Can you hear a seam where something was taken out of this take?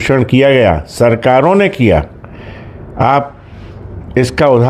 no; 0 cuts

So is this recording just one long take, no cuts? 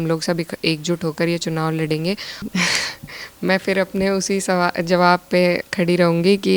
no; 1 cut; at 2.3 s

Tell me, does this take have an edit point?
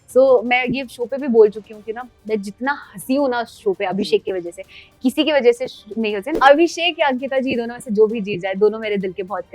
yes; 1 cut; at 6.3 s

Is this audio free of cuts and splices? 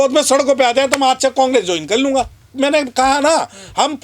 no; 1 cut; at 2.4 s

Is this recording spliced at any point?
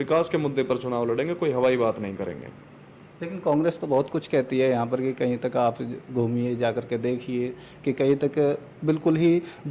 no; 0 cuts

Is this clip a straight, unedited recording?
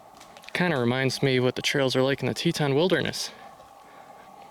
yes; 0 cuts

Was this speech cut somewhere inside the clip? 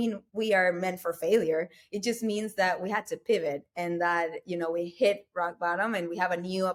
no; 0 cuts

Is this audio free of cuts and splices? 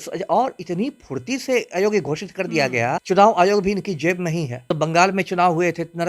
no; 2 cuts; at 3.0 s, 4.7 s

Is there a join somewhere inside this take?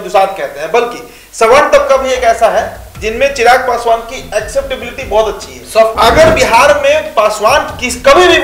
yes; 1 cut; at 5.9 s

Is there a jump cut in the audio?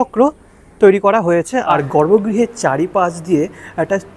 yes; 1 cut; at 1.8 s

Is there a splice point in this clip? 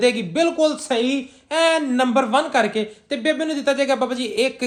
no; 0 cuts

